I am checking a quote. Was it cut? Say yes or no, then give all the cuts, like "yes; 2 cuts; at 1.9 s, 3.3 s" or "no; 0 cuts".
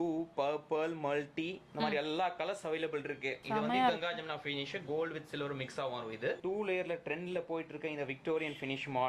yes; 2 cuts; at 3.4 s, 6.4 s